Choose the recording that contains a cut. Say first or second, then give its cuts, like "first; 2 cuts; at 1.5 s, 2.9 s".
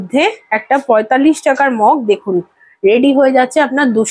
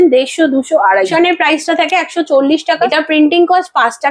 second; 2 cuts; at 1.1 s, 2.9 s